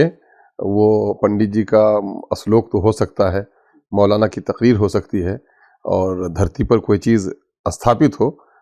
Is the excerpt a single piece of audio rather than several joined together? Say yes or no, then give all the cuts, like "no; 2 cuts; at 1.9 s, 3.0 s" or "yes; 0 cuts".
yes; 0 cuts